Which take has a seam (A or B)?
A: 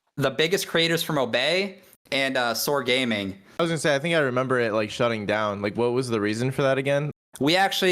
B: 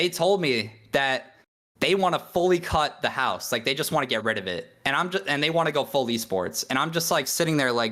A